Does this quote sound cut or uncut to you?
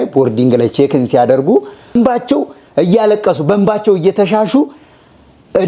cut